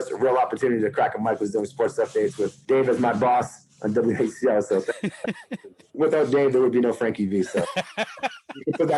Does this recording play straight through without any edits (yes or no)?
no